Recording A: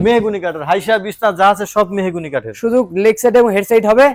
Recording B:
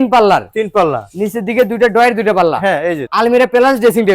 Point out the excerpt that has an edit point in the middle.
B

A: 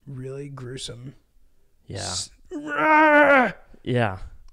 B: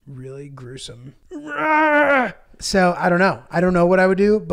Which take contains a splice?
B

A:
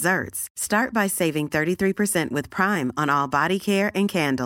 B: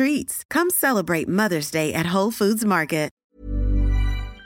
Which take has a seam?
B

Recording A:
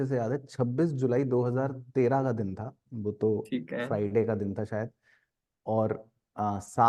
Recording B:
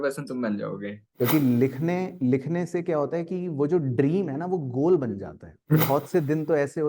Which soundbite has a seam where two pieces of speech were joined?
B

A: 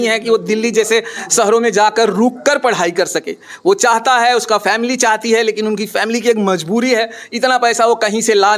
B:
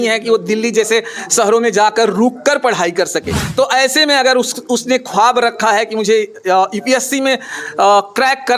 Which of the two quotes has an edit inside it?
B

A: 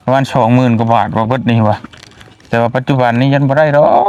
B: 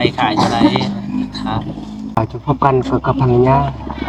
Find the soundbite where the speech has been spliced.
B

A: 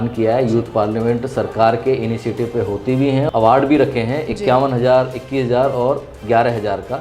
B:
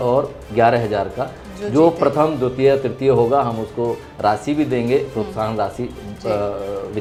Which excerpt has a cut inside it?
A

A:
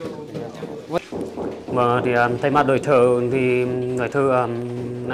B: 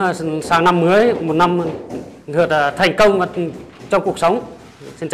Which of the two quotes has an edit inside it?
A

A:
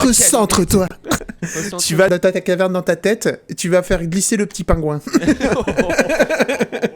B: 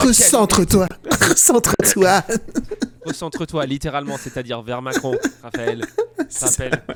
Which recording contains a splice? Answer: A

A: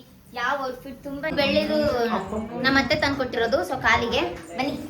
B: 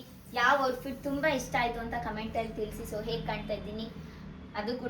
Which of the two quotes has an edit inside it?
A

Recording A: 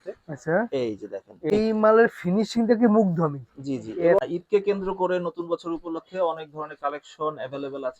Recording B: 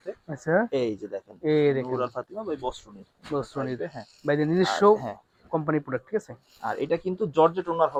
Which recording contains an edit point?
A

